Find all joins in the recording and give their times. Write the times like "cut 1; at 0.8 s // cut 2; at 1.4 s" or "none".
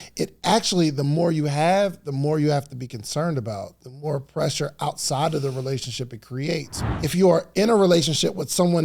cut 1; at 6.8 s